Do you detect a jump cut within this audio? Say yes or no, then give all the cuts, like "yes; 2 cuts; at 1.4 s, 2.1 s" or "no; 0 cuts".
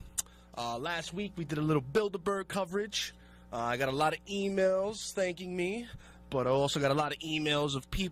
no; 0 cuts